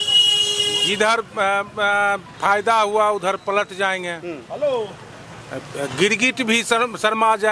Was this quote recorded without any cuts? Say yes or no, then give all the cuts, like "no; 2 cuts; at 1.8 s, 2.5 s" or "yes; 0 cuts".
yes; 0 cuts